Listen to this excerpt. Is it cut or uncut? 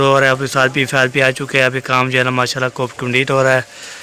uncut